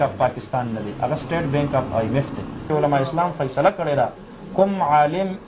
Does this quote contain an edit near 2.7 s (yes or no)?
yes